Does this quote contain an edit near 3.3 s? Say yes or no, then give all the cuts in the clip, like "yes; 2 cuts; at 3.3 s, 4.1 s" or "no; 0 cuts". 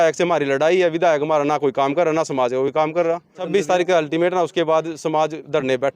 yes; 1 cut; at 3.3 s